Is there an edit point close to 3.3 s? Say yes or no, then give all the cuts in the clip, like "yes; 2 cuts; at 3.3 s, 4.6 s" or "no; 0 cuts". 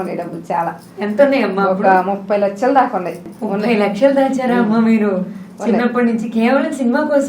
yes; 1 cut; at 3.3 s